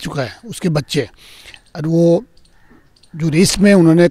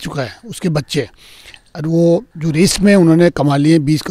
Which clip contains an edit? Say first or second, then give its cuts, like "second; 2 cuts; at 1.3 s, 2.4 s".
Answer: second; 1 cut; at 2.3 s